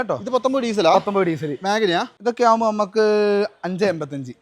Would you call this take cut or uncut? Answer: cut